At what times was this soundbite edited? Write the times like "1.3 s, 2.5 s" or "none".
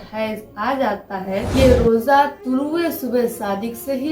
1.5 s